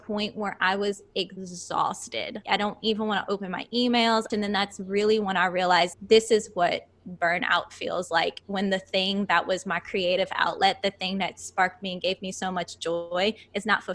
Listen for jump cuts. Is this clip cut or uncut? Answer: cut